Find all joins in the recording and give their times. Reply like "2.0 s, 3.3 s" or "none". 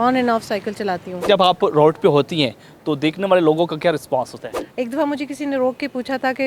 1.2 s, 4.6 s